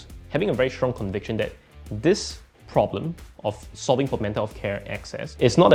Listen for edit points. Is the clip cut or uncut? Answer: uncut